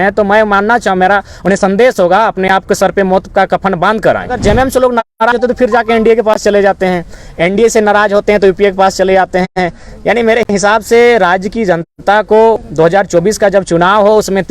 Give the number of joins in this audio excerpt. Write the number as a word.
one